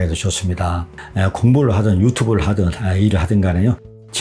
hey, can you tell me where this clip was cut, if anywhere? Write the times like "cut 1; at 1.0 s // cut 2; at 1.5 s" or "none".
cut 1; at 1.0 s

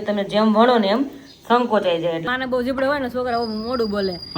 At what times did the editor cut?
cut 1; at 2.2 s

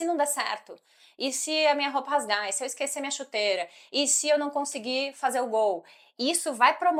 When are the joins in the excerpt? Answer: none

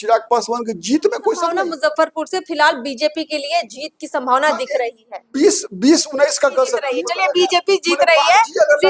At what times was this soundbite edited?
cut 1; at 1.5 s // cut 2; at 7.0 s

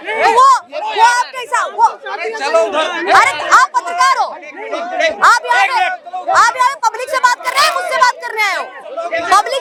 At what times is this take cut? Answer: none

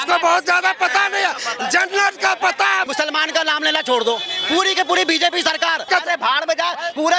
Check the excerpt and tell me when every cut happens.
cut 1; at 2.9 s // cut 2; at 5.9 s

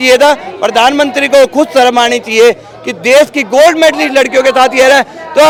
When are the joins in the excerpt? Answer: none

